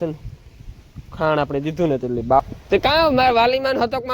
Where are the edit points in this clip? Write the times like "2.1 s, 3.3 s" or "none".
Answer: 2.4 s